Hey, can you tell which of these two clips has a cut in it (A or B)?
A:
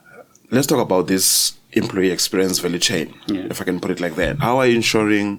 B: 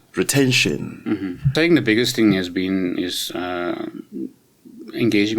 B